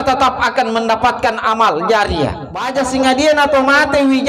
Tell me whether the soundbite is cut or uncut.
cut